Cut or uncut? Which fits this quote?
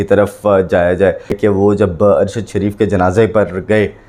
cut